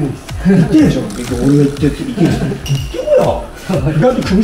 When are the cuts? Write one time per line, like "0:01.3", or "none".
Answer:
0:02.6